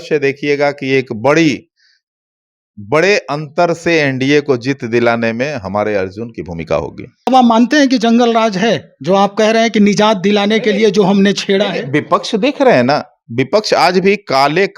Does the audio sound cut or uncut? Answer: cut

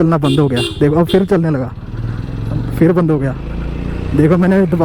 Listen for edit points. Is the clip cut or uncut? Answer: uncut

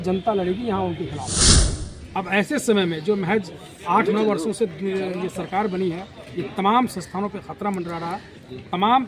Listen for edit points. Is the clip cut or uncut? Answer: cut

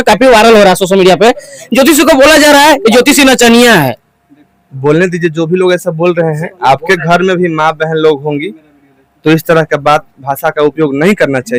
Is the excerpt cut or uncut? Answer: uncut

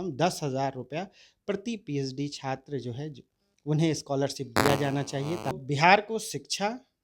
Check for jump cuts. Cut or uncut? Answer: cut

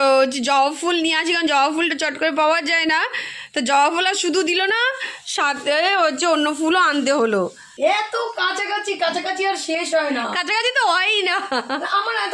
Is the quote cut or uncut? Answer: cut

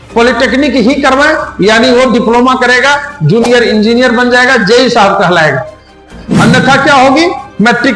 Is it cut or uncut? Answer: cut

